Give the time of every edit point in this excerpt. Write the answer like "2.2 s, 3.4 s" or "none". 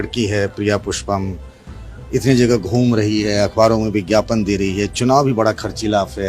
none